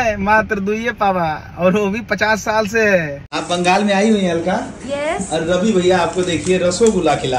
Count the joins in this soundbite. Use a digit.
1